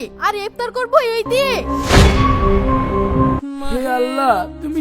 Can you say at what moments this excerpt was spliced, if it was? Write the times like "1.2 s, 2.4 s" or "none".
1.6 s, 3.4 s

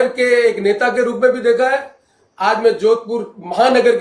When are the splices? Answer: none

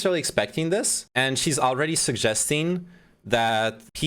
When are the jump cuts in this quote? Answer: 1.0 s

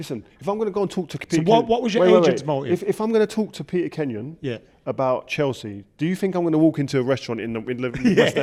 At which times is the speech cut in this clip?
none

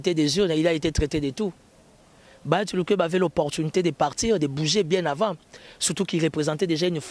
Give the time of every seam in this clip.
none

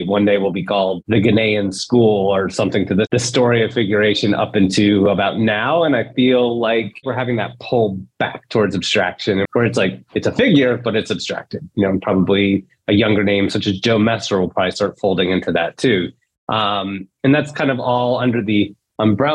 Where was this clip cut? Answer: 3.1 s, 7.0 s, 9.4 s

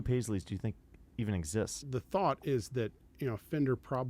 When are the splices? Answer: 1.8 s

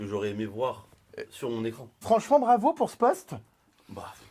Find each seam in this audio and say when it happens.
1.9 s

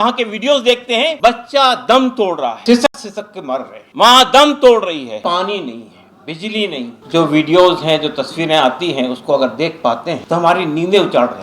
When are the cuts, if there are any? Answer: 1.1 s, 2.6 s, 3.8 s, 5.2 s, 6.9 s, 10.2 s

